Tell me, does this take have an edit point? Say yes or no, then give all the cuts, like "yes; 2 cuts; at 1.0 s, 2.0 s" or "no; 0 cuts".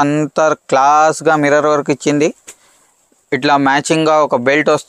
no; 0 cuts